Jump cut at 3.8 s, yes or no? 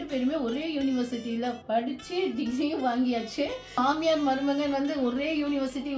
yes